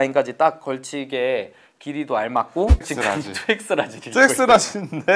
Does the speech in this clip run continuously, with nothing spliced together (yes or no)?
no